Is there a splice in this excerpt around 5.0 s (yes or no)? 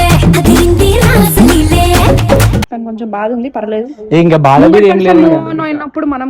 no